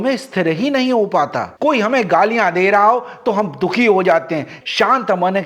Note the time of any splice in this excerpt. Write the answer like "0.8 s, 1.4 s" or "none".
1.5 s, 4.6 s